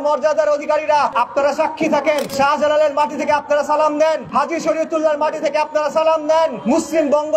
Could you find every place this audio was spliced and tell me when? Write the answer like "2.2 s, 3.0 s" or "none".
1.1 s, 2.3 s, 4.2 s, 6.6 s

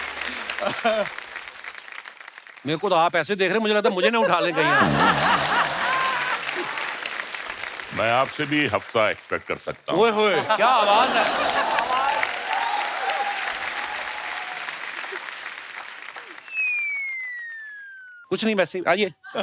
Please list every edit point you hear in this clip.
none

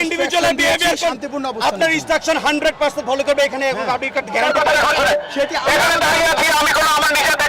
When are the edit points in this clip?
4.5 s

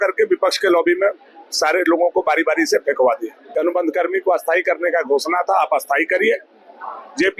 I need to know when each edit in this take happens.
3.4 s

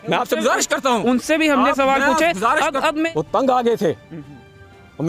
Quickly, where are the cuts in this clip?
3.1 s

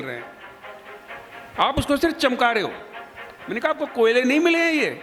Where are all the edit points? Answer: none

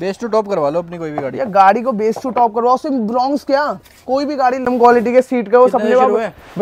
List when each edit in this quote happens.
4.6 s

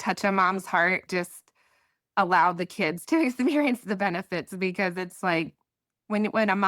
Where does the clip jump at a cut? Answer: 1.0 s

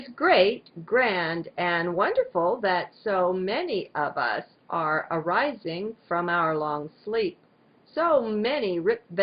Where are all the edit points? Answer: none

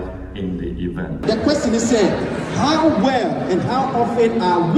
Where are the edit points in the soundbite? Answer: 1.2 s

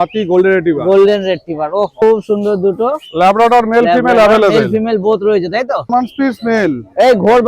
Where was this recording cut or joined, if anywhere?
1.9 s, 5.9 s

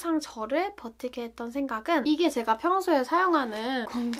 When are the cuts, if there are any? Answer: 2.0 s

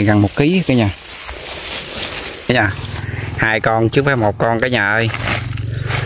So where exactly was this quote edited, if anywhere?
2.5 s

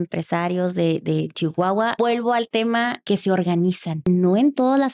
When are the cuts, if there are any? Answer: 1.9 s, 3.0 s, 4.1 s

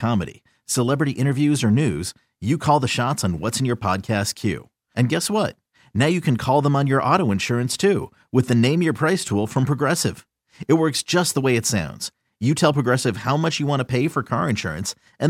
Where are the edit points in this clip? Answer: none

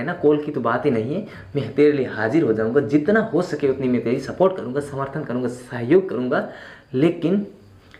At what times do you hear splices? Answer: none

